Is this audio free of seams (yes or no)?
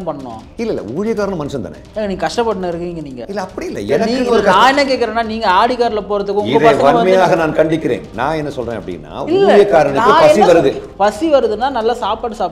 yes